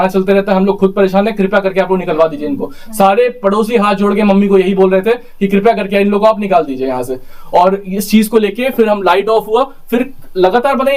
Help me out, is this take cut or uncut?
uncut